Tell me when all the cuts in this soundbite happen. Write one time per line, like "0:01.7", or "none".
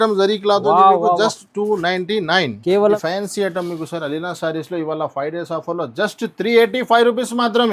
0:02.9